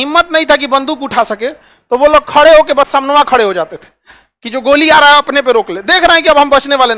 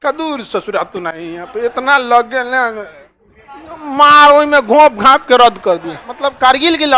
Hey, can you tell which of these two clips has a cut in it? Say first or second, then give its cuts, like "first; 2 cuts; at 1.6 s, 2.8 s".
second; 1 cut; at 6.1 s